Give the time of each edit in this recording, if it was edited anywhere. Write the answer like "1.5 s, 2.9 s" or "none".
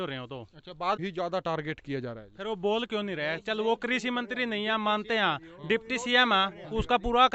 1.0 s